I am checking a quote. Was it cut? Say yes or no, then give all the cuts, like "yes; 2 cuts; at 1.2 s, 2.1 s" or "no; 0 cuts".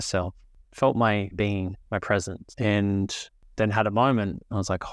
yes; 1 cut; at 1.3 s